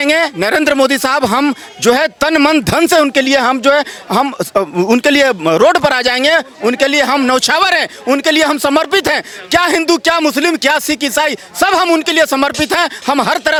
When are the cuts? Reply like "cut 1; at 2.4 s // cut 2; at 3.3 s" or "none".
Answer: none